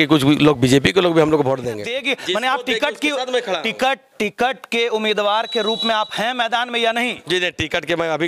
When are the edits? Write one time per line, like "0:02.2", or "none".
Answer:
0:01.7